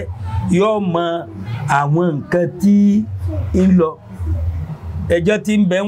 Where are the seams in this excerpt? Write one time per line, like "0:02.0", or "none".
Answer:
0:04.6